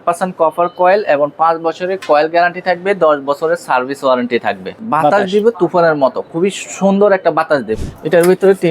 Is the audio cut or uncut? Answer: cut